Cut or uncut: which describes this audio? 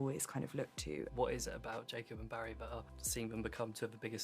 cut